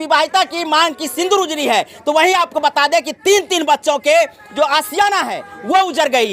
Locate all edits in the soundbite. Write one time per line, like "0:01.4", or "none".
0:04.4